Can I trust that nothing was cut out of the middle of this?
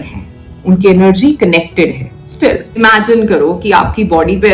no; 1 cut; at 2.8 s

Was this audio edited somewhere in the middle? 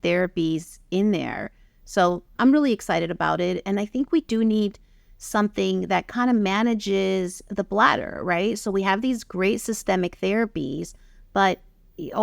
yes; 1 cut; at 2.3 s

